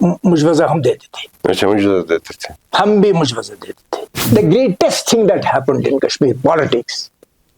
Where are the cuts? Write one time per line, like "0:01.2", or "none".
0:04.1